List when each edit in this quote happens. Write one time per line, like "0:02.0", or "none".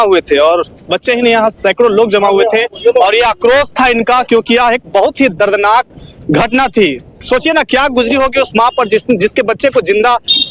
none

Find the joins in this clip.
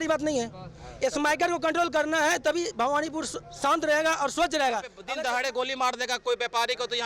0:05.0

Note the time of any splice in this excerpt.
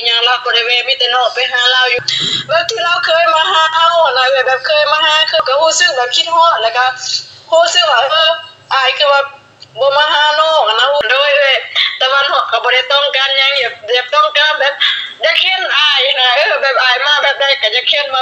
0:02.0
0:05.4
0:11.0

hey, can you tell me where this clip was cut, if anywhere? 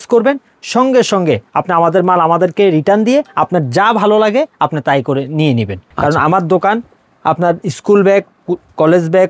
0:05.8

